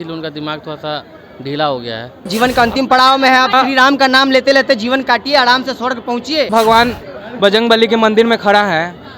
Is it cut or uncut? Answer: cut